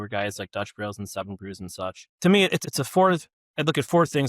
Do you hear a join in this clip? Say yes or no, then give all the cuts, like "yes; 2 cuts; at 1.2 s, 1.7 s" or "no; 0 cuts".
yes; 2 cuts; at 2.1 s, 2.6 s